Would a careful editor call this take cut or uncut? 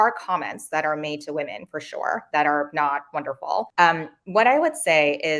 uncut